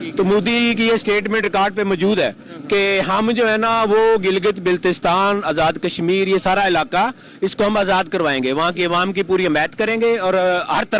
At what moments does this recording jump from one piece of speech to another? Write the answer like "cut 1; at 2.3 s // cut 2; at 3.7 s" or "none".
none

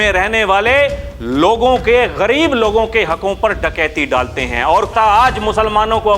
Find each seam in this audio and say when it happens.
cut 1; at 4.9 s

